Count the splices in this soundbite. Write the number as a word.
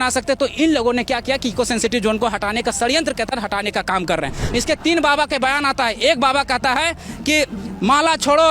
one